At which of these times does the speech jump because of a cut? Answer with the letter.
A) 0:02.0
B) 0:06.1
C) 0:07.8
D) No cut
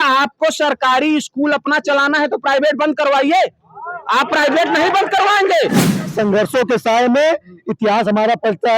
B